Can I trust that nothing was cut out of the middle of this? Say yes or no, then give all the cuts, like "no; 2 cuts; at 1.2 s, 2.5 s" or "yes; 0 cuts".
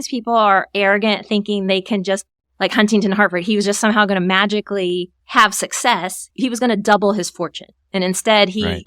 no; 1 cut; at 6.3 s